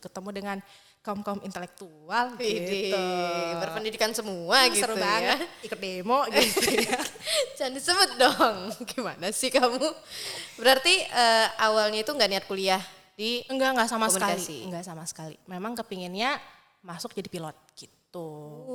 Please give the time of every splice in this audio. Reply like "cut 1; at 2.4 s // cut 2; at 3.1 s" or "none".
none